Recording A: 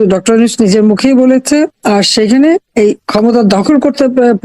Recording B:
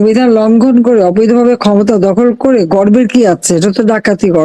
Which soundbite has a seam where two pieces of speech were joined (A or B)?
A